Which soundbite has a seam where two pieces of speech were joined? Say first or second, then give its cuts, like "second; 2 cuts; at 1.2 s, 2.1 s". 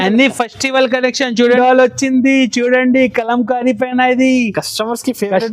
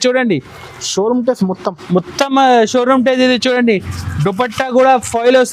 first; 1 cut; at 1.6 s